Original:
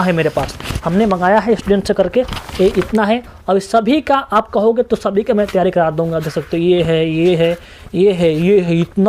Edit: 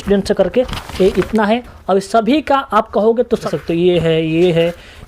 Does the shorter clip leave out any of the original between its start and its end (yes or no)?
yes